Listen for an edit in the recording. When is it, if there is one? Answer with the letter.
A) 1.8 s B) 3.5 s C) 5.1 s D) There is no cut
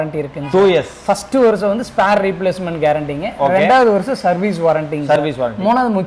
D